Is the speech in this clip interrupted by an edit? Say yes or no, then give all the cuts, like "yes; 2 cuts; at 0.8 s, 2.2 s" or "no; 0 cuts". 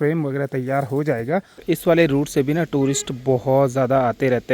yes; 1 cut; at 1.6 s